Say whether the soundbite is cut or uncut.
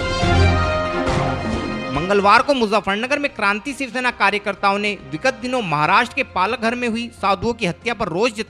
uncut